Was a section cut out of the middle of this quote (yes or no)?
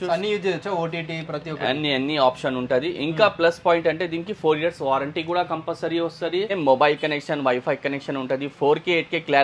yes